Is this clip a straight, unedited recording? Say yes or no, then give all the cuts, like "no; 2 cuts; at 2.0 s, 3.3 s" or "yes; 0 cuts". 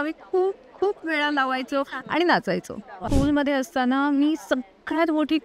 no; 1 cut; at 3.0 s